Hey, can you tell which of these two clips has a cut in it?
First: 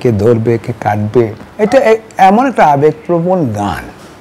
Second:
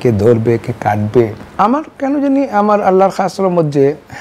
first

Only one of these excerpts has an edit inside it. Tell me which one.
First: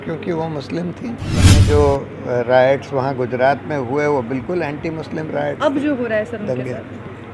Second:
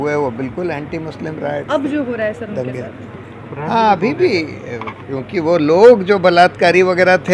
first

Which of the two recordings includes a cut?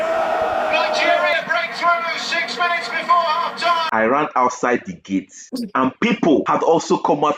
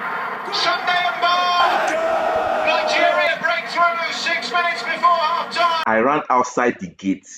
first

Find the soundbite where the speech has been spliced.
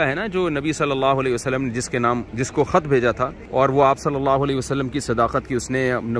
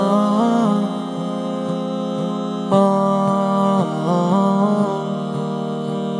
first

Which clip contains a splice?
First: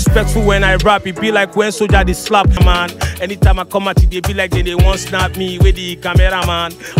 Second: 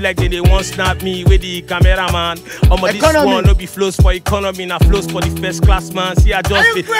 first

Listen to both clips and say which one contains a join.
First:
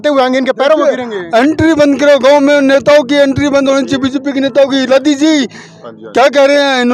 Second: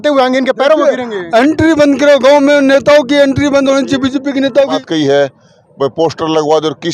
second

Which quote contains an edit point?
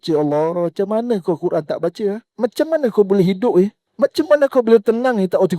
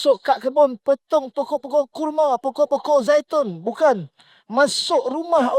first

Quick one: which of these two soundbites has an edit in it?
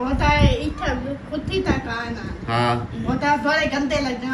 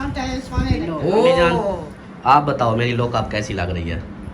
second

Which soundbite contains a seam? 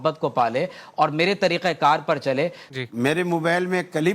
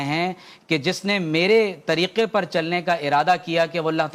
first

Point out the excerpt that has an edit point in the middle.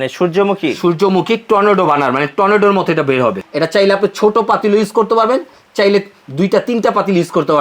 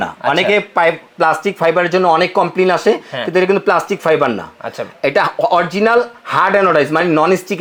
first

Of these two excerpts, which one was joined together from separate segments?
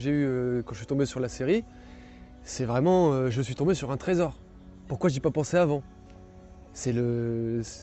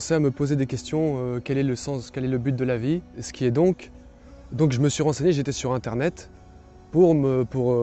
second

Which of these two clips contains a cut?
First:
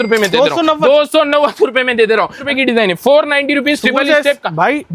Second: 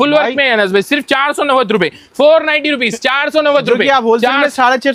first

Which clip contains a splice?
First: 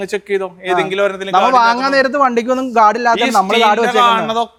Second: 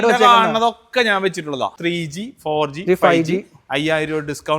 second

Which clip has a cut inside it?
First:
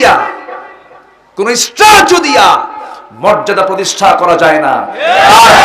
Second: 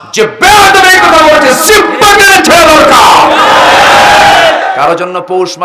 second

